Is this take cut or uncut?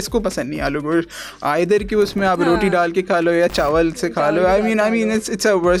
uncut